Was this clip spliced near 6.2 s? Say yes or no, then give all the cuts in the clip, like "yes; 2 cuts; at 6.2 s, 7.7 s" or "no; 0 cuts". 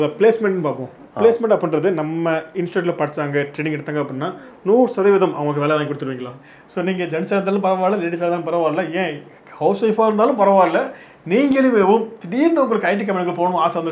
yes; 1 cut; at 6.2 s